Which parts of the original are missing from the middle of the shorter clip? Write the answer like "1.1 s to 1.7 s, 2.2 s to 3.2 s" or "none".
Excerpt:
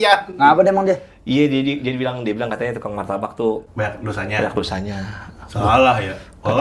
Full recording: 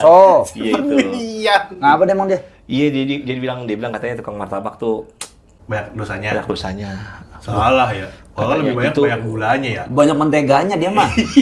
5.1 s to 5.6 s